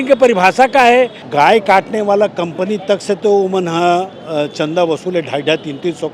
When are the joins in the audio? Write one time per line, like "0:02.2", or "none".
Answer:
0:01.2